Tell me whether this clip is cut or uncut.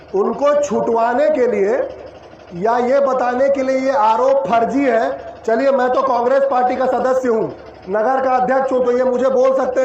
uncut